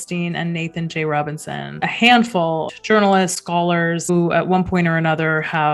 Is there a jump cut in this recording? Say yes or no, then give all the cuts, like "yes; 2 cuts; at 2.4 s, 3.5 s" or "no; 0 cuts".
yes; 3 cuts; at 1.8 s, 2.7 s, 4.1 s